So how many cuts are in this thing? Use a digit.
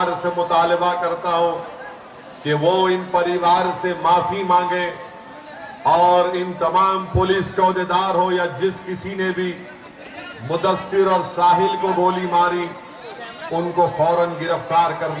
0